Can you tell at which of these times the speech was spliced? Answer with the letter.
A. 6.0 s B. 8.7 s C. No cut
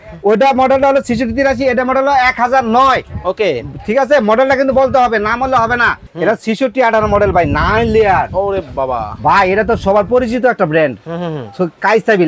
A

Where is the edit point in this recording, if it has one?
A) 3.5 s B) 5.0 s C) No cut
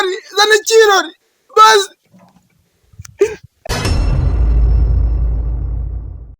A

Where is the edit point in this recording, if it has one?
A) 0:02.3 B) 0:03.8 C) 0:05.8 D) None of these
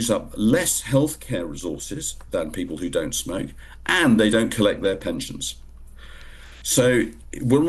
D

